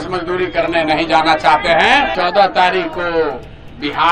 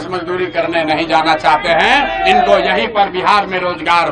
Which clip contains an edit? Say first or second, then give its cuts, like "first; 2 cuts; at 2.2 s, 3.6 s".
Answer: first; 1 cut; at 2.1 s